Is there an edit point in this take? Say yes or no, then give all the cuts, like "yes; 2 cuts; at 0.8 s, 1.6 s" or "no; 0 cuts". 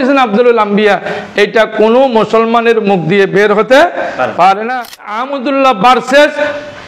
yes; 1 cut; at 4.9 s